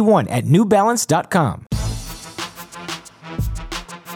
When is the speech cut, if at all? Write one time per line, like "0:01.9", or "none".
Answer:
0:01.7